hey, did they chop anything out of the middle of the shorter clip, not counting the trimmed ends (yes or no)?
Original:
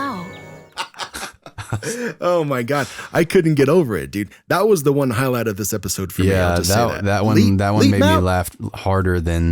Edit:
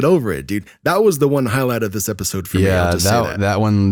no